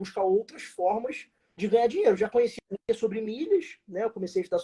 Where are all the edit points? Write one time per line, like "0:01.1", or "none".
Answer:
none